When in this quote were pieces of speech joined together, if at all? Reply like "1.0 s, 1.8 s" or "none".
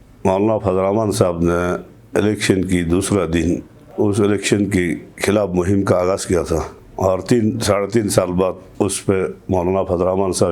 3.8 s, 6.8 s, 8.6 s

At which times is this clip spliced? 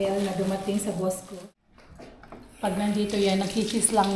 1.3 s

